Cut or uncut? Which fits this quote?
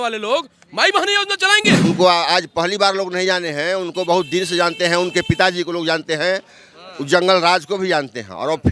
cut